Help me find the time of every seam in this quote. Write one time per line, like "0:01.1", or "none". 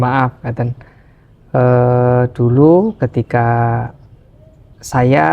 none